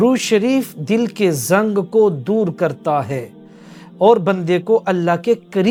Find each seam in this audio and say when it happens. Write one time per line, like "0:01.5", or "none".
none